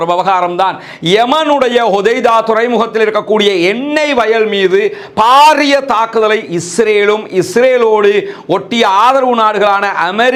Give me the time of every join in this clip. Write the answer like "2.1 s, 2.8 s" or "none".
none